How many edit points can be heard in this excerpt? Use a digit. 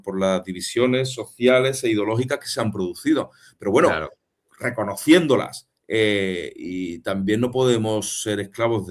0